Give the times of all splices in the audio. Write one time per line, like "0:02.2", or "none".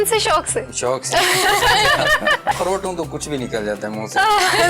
0:02.6